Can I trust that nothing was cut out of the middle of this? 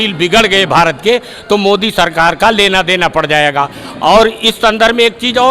yes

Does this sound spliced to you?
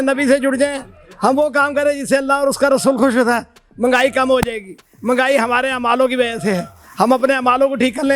no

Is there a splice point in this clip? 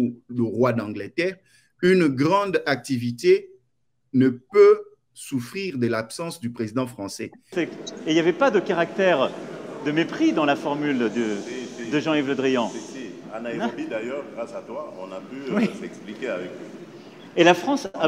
yes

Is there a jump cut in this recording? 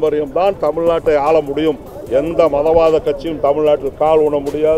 no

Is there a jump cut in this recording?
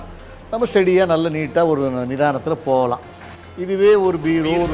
no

